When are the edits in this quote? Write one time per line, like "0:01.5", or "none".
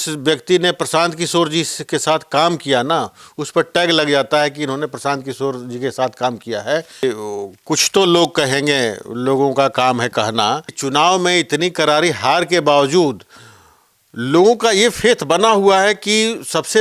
0:07.0
0:10.7